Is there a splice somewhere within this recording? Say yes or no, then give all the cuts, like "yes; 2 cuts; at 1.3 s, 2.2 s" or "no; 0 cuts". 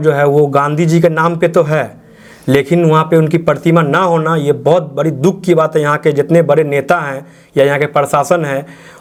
no; 0 cuts